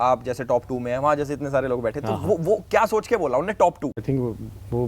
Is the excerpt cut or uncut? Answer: cut